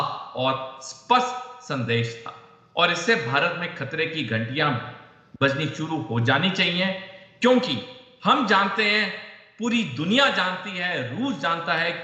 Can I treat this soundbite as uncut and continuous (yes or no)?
yes